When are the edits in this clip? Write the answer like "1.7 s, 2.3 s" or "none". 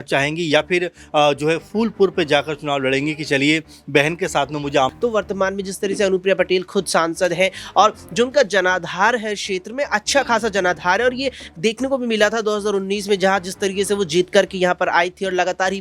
4.9 s